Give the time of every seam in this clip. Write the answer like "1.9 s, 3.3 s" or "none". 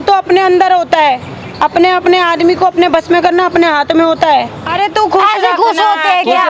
4.6 s